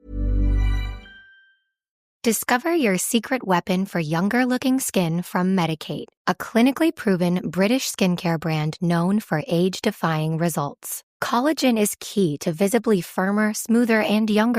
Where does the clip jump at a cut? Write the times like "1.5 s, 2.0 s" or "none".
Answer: 2.0 s